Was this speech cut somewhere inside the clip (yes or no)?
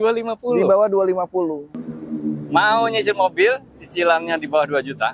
yes